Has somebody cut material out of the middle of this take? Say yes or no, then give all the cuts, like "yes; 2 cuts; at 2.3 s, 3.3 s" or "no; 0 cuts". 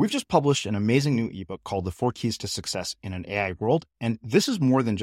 no; 0 cuts